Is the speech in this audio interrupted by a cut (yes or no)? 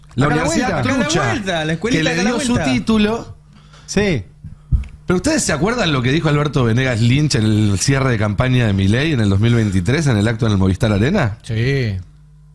no